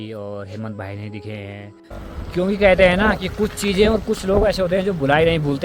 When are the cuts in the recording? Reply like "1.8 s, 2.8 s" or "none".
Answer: 2.0 s

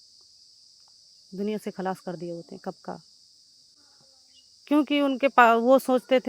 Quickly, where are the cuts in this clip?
none

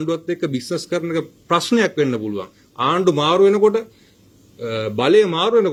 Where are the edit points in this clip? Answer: none

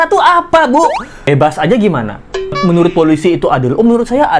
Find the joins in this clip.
1.1 s

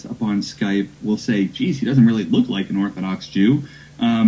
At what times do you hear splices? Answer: 1.0 s

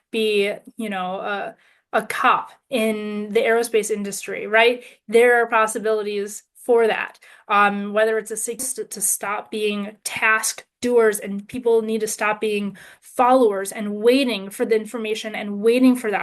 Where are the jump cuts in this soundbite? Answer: 8.7 s

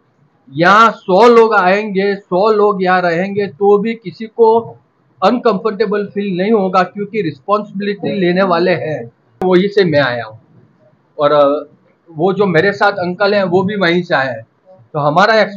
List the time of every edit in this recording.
9.4 s

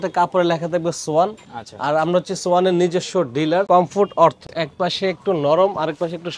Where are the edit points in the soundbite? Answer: 3.7 s, 4.5 s

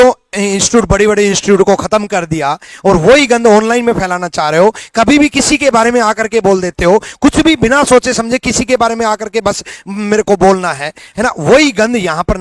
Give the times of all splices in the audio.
none

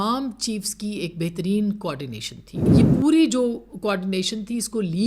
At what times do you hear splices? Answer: 2.6 s

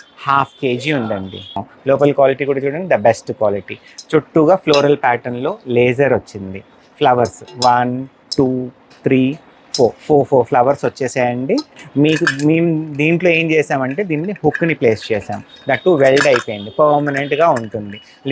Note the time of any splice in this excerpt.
1.6 s, 11.8 s

